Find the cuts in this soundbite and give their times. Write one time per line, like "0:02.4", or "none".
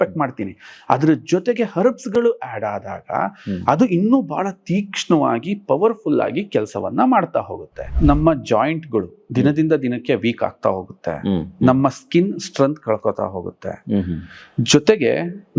0:07.9